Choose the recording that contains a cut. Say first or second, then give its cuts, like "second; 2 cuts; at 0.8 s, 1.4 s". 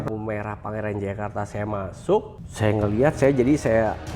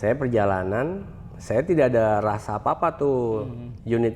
first; 1 cut; at 2.4 s